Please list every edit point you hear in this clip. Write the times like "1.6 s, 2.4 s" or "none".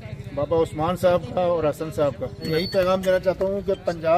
2.4 s